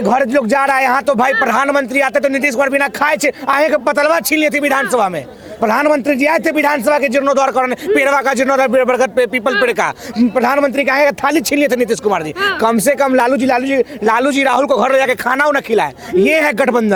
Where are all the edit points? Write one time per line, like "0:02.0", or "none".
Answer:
none

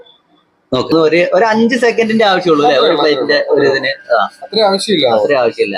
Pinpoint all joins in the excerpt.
0:00.9

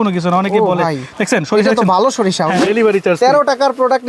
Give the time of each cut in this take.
0:02.6

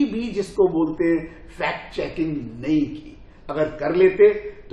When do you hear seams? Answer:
none

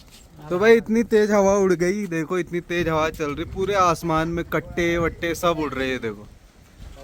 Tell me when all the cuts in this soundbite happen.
none

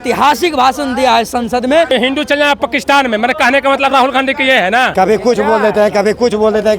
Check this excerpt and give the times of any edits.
0:01.9
0:04.9

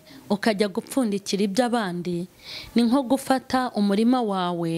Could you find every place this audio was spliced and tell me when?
none

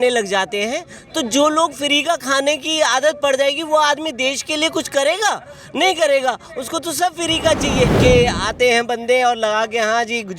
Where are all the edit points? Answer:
0:08.0

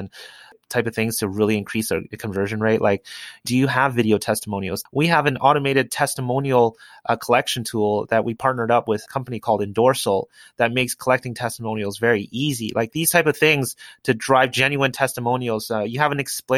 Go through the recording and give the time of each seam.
0:03.4

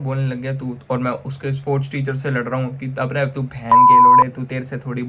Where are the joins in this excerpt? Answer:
0:03.7
0:04.2

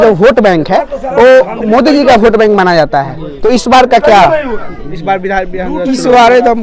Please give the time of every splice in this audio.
none

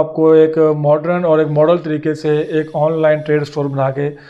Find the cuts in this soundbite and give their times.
none

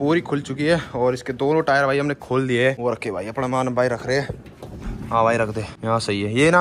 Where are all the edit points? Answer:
0:02.8
0:05.7

